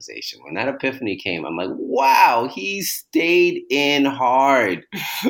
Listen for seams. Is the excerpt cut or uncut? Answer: uncut